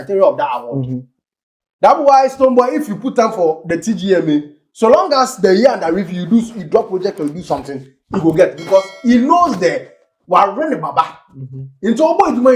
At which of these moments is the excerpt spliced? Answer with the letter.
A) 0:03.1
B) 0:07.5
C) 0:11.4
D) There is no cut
D